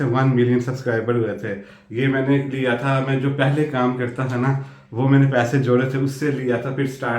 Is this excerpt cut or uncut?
uncut